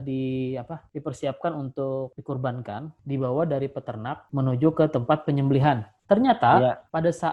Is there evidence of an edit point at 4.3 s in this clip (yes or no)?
yes